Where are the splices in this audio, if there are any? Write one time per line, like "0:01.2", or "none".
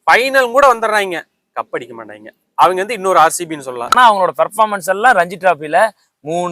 0:03.9